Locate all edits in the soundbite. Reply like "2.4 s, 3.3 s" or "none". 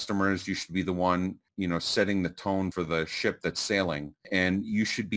2.7 s, 4.3 s